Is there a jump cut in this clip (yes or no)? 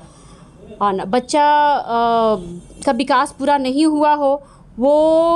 no